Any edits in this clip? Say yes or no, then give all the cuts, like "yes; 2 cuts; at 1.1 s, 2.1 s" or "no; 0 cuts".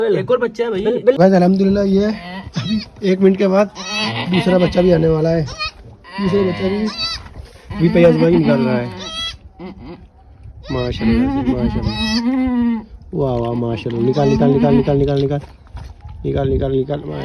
yes; 1 cut; at 1.2 s